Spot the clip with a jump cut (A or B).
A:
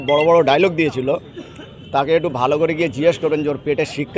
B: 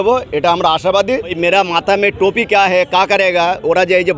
B